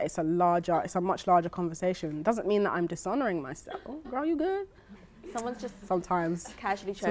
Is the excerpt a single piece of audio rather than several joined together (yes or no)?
no